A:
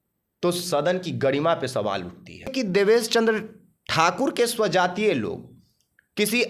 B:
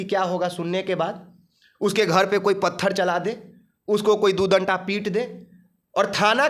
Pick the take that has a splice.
A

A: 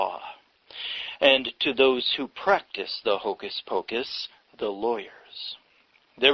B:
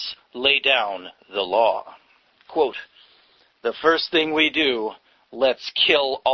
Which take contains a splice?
A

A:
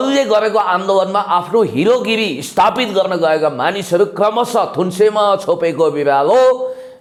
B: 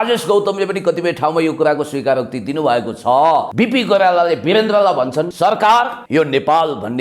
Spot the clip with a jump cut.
B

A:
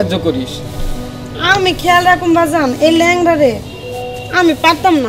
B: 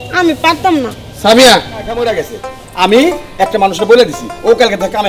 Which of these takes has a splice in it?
B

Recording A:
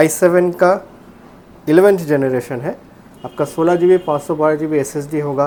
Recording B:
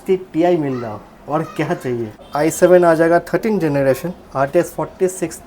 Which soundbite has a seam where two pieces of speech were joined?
B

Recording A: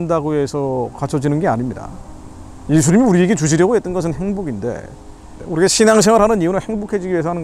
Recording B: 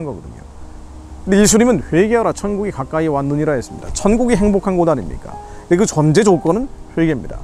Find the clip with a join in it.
A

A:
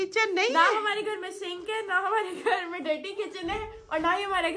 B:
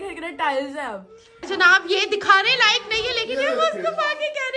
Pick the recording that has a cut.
B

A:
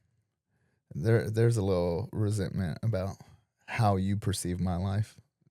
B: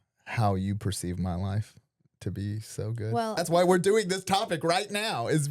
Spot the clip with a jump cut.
B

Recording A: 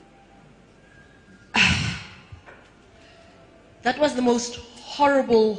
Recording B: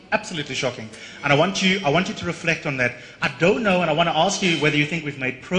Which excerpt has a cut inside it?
A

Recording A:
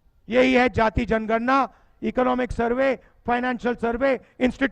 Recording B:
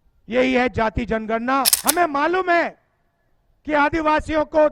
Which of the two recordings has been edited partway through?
B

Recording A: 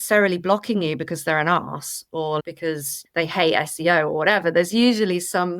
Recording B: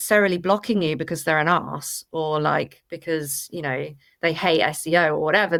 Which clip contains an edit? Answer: A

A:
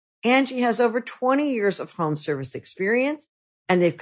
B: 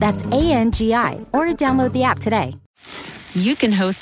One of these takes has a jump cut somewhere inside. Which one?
B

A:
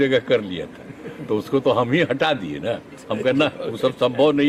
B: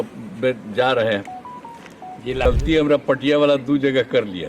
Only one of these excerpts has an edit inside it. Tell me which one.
B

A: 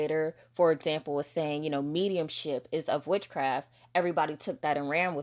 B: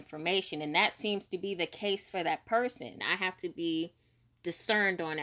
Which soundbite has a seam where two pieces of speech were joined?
B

